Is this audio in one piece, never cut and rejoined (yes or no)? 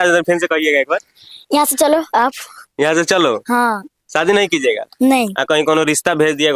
yes